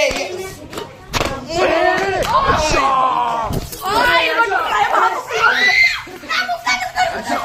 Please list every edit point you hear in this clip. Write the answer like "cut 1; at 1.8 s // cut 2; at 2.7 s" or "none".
none